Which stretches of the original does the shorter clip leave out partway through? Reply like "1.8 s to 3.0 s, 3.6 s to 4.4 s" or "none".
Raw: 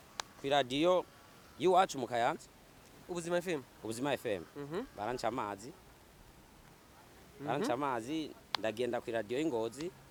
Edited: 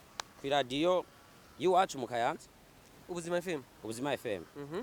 none